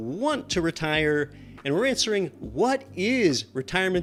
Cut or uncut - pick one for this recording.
uncut